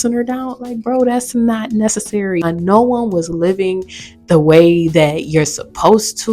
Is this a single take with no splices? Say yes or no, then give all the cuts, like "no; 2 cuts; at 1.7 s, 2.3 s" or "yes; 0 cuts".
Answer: no; 1 cut; at 2.4 s